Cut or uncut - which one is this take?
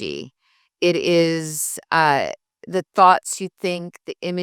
uncut